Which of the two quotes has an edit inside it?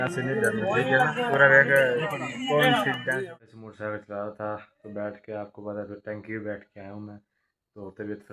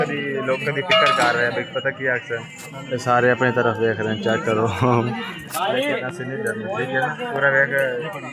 first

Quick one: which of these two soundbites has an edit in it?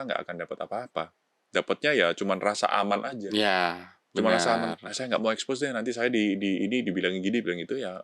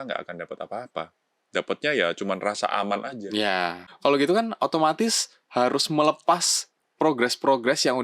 second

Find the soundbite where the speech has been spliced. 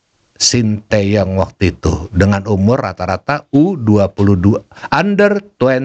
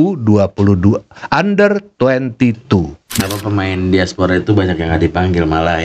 second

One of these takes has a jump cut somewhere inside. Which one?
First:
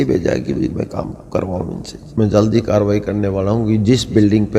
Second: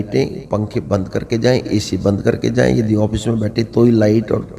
first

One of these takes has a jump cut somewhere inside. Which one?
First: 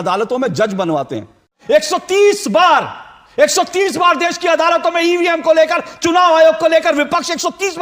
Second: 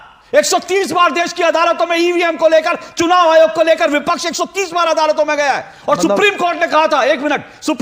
first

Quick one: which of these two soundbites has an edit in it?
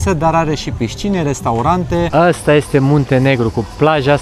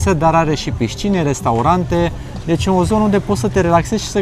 first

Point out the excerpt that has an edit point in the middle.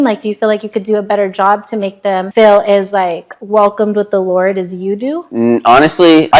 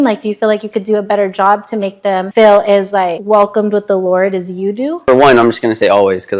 second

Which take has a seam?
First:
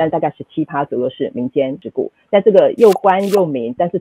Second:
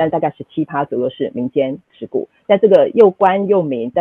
first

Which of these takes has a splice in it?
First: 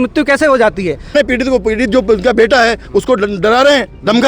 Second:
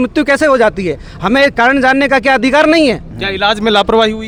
first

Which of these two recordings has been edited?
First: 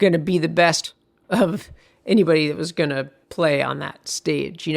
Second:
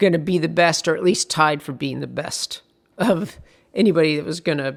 first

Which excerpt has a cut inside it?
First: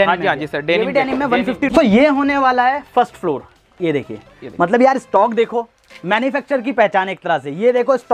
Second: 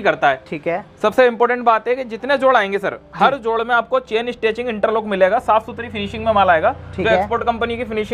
first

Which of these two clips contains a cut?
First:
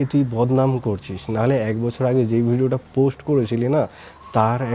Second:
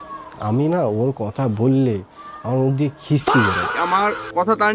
second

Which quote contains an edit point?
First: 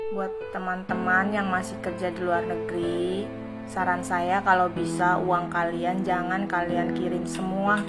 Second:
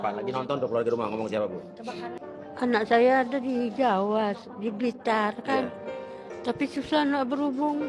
second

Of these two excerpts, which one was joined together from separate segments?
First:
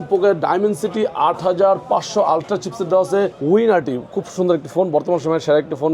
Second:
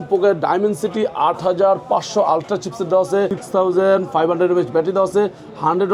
first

